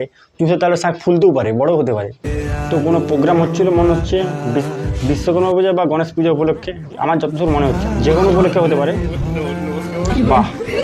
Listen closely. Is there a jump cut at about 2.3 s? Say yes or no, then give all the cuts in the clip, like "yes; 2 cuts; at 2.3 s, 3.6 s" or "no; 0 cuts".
yes; 1 cut; at 2.3 s